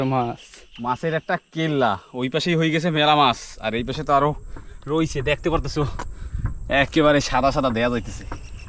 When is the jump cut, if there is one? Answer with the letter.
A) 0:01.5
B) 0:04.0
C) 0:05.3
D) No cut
D